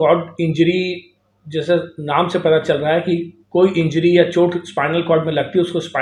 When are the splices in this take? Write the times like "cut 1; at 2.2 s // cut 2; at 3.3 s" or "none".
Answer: none